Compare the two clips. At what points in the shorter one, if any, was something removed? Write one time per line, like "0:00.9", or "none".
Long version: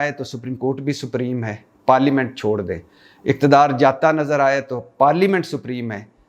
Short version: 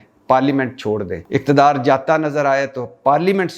0:01.2